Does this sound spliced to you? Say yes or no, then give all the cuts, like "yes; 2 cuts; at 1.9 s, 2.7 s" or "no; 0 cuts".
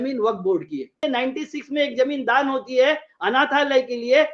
yes; 1 cut; at 1.0 s